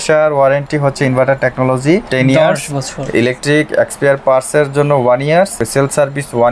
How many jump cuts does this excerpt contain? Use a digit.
2